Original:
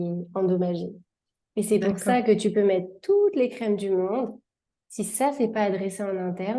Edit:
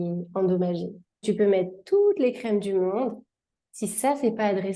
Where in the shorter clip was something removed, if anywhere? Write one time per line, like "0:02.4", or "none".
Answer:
0:01.2